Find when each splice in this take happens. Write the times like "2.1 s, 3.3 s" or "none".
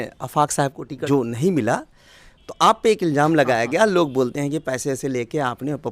0.9 s